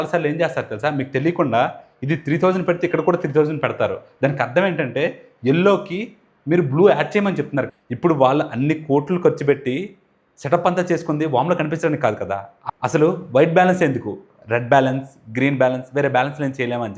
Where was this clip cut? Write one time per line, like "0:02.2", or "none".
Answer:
0:07.7
0:12.5